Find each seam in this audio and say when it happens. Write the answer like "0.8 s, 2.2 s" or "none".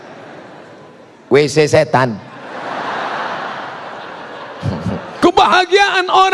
5.2 s